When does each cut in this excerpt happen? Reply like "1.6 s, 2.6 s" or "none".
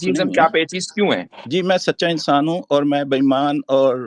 1.3 s